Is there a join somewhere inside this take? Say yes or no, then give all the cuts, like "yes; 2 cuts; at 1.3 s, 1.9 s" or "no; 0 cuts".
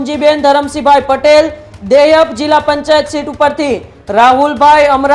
no; 0 cuts